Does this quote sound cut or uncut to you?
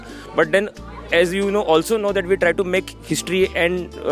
uncut